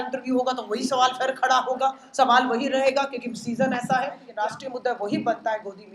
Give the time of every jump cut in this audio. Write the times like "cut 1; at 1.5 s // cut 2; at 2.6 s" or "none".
cut 1; at 4.3 s